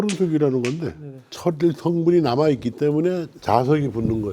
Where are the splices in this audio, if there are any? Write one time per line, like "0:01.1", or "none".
0:01.3